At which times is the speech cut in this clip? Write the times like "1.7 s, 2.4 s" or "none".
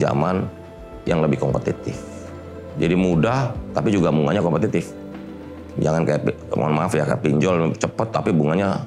none